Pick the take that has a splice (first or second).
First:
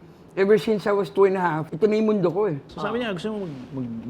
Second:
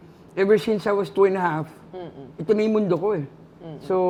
first